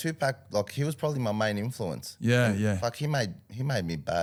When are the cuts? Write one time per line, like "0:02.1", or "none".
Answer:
none